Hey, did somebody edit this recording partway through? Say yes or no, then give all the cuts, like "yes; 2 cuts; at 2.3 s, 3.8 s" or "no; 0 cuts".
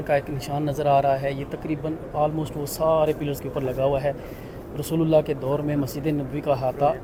no; 0 cuts